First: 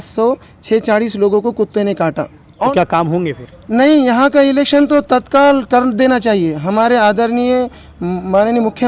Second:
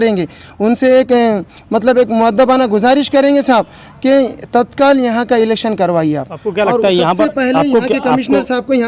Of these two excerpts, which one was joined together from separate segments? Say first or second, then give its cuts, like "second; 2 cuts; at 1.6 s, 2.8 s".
first; 1 cut; at 2.7 s